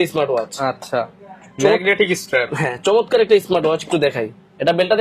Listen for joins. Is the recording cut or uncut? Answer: uncut